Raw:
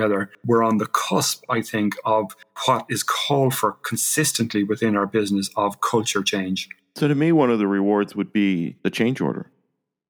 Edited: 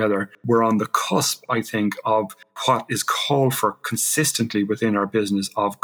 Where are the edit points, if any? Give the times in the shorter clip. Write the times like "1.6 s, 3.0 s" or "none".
none